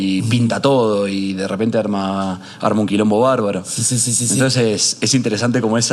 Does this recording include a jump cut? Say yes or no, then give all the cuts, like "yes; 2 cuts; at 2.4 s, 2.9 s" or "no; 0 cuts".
no; 0 cuts